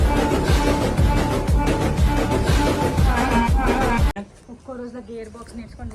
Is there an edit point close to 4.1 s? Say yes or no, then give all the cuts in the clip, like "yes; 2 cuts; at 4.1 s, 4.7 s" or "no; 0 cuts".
yes; 1 cut; at 4.1 s